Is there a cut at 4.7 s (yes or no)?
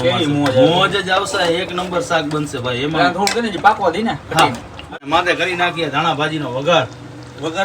yes